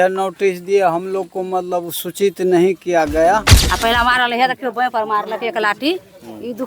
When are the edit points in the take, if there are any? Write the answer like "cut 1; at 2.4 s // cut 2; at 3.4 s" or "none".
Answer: cut 1; at 3.6 s